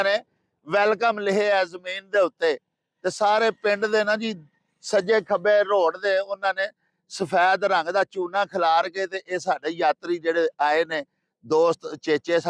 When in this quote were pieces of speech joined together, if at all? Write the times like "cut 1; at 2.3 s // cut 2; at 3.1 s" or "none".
none